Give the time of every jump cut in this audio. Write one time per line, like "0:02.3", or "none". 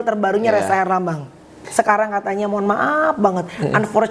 0:01.6